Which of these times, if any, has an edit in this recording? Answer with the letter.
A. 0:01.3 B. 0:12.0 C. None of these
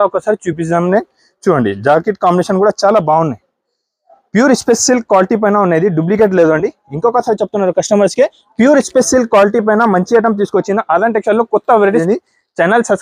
B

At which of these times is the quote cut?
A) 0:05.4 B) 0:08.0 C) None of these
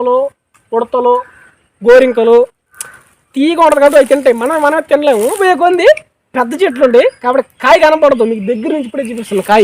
A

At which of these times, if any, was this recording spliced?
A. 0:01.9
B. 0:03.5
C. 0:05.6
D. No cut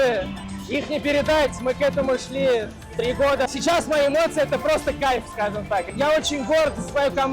B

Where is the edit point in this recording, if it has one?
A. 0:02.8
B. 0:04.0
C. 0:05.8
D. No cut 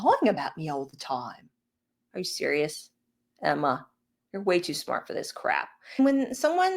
D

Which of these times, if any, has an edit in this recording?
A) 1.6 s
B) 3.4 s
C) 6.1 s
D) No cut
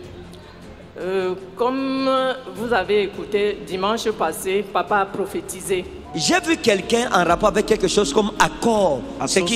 C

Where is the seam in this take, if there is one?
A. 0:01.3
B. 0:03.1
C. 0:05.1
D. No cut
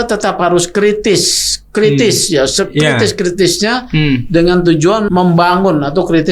C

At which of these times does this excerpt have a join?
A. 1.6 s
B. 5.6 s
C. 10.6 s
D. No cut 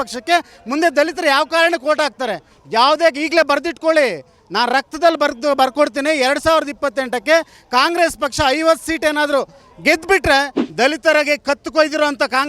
C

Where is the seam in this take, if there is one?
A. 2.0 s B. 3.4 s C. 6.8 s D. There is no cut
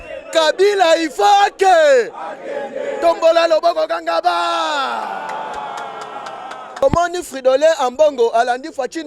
C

